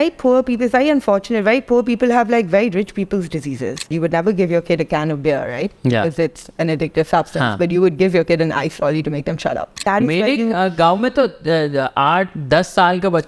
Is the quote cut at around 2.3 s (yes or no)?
no